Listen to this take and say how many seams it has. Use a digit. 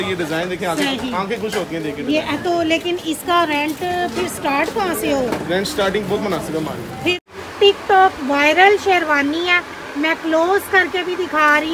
1